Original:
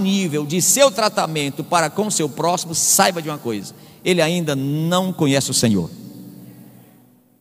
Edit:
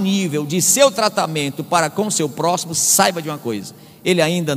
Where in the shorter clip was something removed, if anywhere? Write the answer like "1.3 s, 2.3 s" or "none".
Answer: none